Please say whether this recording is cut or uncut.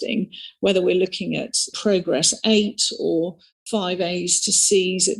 cut